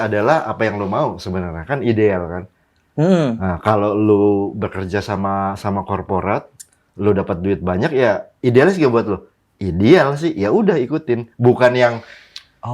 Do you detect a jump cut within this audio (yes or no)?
no